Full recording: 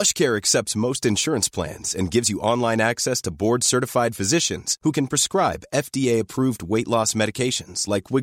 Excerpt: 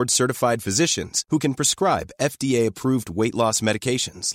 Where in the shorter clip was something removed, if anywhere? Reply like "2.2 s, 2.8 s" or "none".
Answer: none

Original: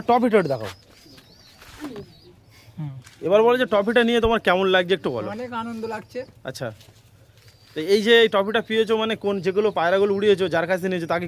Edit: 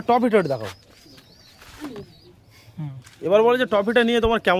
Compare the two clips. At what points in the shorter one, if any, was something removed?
none

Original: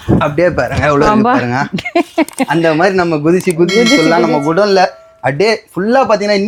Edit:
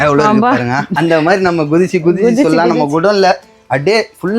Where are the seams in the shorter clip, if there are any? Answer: 1.0 s

